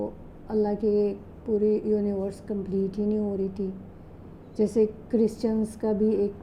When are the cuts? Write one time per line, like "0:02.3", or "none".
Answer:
none